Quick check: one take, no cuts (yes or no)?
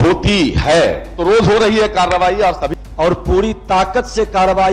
no